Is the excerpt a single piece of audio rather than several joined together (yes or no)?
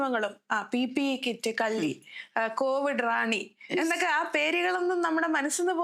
yes